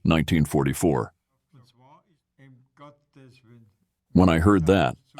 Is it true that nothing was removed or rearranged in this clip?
no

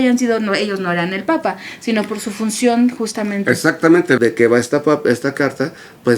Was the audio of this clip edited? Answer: yes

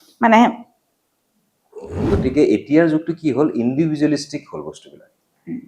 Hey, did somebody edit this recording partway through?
yes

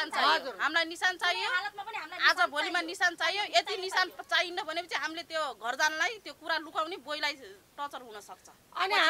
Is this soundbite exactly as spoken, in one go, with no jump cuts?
yes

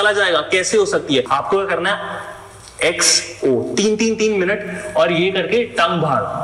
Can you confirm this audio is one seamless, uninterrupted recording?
no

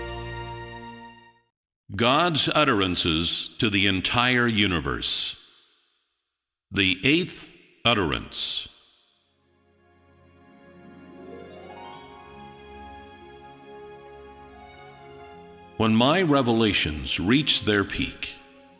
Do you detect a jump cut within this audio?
yes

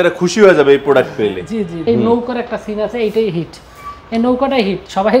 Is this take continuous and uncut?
no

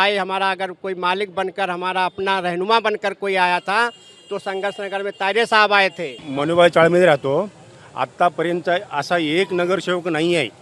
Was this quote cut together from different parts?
no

